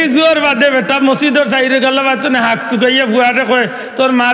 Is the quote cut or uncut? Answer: uncut